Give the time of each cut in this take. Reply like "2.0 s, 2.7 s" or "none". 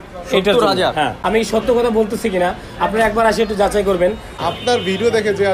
1.2 s, 4.4 s

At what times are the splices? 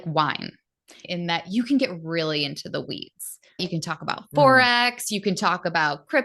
1.0 s, 3.6 s

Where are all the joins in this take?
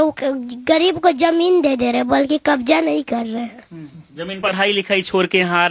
4.4 s

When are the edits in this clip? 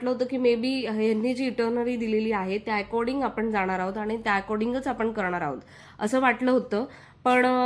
none

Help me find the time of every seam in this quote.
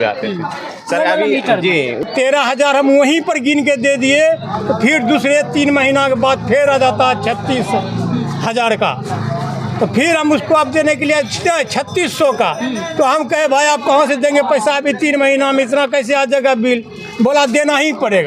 2.1 s

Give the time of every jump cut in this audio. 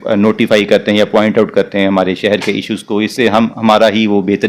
none

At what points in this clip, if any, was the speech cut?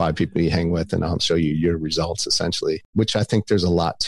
1.2 s

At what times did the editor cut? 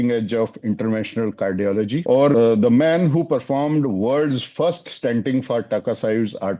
2.3 s

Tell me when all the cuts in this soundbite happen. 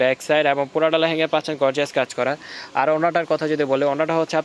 none

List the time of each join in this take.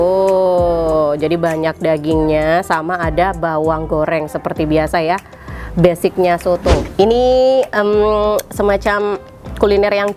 6.8 s

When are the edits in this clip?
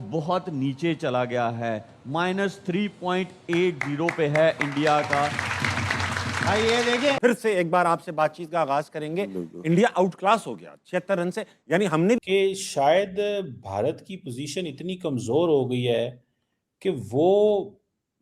7.2 s, 12.2 s

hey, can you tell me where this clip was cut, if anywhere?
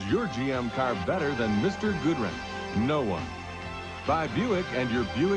4.0 s

